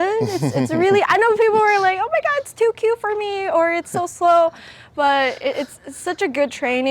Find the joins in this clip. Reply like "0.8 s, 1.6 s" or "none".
none